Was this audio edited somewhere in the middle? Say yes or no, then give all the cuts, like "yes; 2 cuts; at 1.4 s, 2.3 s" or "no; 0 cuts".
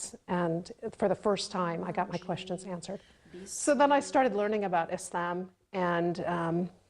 yes; 1 cut; at 3.5 s